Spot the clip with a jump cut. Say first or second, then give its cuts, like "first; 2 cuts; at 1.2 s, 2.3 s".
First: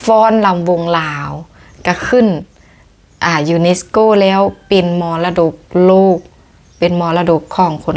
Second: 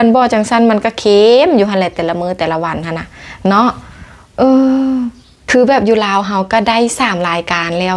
second; 1 cut; at 5.5 s